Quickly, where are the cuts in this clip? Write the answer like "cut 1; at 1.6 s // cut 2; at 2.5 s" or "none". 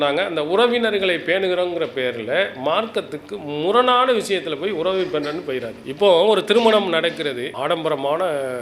cut 1; at 7.5 s